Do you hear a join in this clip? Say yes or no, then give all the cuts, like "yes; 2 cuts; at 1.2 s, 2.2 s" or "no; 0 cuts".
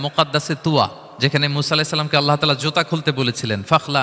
yes; 1 cut; at 1.0 s